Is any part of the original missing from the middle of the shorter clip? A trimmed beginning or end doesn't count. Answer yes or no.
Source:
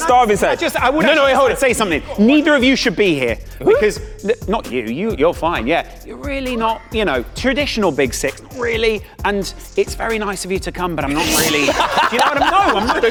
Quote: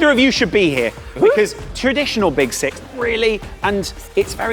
yes